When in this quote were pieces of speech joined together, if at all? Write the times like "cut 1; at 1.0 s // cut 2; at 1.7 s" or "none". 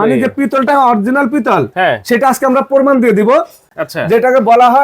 cut 1; at 3.8 s